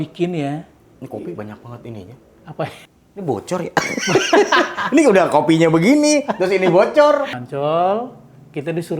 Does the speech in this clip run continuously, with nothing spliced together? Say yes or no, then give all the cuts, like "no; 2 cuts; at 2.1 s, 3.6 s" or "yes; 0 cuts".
no; 2 cuts; at 2.8 s, 7.4 s